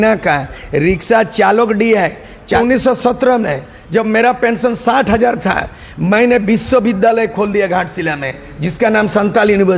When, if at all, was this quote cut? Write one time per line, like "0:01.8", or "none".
0:02.6